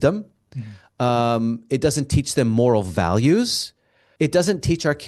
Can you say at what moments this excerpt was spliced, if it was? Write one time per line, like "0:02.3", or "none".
none